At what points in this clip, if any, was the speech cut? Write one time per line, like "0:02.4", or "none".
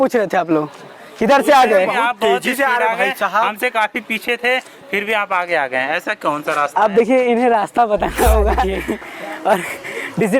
0:08.8